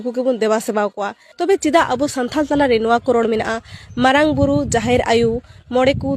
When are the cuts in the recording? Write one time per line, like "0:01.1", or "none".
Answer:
none